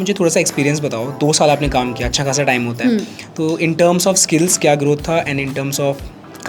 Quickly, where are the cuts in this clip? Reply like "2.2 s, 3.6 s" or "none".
none